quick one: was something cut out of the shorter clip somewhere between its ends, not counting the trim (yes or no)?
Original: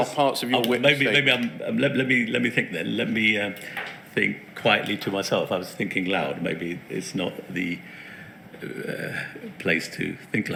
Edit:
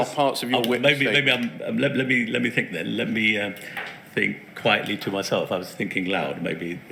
no